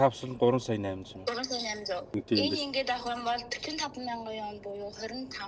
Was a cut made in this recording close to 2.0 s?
yes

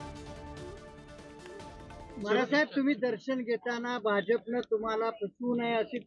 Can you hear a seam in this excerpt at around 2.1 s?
yes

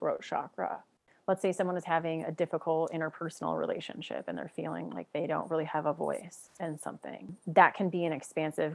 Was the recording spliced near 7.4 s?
yes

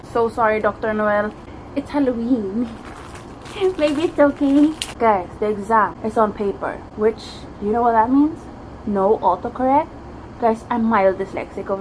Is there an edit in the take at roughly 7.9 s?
no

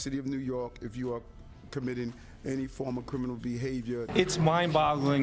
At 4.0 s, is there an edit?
yes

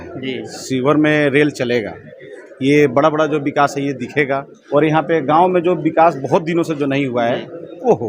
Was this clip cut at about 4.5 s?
yes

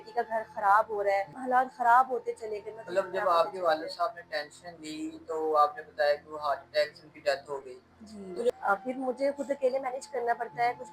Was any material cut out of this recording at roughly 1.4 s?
yes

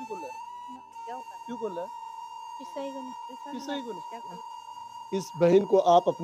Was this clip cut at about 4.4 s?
yes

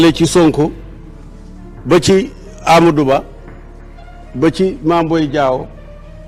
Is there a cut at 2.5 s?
no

